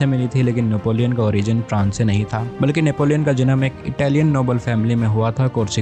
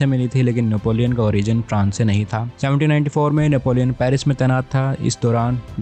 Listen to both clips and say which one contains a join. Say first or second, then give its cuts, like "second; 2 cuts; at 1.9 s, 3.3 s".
second; 1 cut; at 2.4 s